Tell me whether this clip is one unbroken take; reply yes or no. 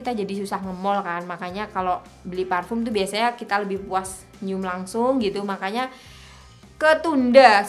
yes